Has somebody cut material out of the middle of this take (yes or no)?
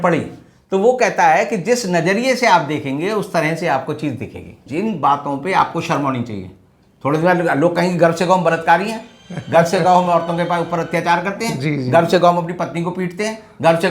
yes